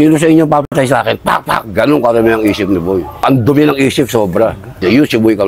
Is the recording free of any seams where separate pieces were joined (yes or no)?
yes